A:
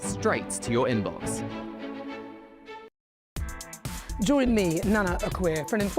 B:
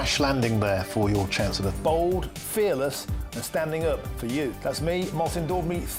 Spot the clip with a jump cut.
A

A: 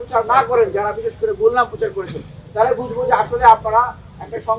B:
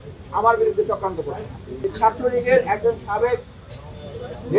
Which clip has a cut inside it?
B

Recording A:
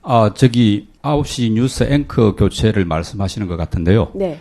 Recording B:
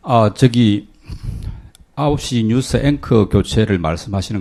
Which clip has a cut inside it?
A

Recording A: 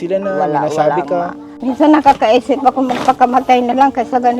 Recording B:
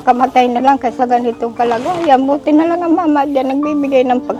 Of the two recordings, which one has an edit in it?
A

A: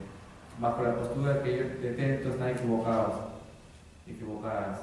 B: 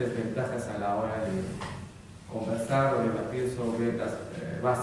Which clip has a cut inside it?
B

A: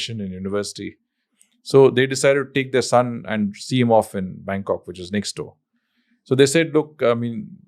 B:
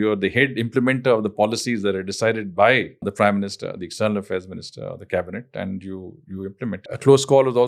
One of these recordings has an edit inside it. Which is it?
B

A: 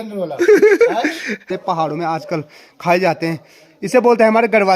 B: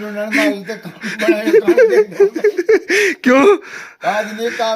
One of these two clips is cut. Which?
A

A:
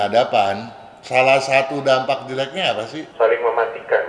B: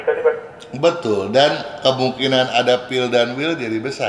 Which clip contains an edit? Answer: A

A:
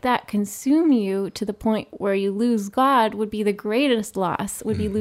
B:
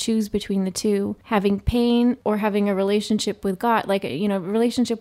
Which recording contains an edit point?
B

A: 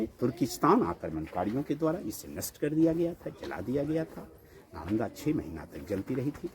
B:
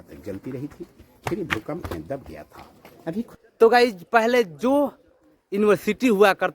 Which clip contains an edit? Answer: B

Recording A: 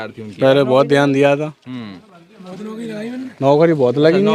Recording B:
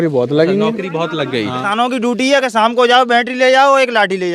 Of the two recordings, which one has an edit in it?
B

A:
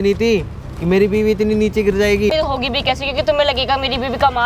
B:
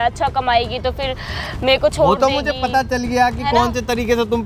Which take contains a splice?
A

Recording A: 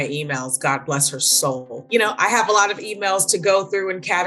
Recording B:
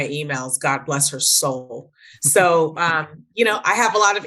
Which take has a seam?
A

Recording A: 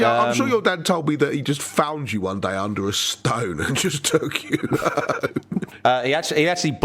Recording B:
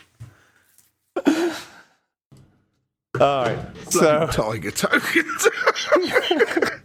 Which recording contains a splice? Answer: A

